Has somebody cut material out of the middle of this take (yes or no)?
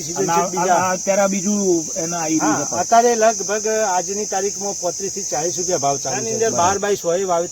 yes